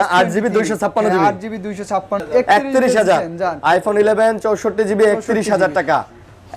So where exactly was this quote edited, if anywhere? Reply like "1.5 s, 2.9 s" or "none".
2.2 s